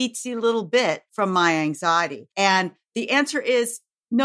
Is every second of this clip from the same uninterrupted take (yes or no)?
no